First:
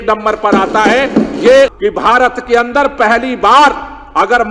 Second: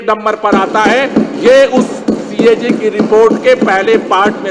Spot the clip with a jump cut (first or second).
first